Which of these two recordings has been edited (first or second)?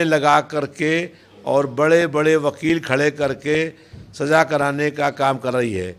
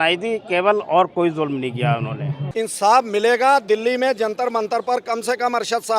second